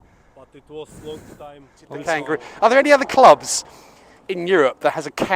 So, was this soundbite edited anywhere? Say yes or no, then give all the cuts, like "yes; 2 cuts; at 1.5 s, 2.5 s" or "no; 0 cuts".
yes; 1 cut; at 1.9 s